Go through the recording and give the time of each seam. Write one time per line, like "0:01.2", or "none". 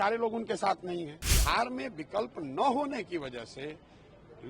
0:01.3